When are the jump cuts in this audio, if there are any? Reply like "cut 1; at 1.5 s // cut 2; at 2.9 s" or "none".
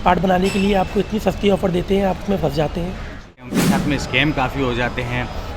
cut 1; at 3.4 s